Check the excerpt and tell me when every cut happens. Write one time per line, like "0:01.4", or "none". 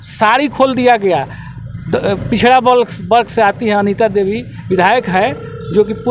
none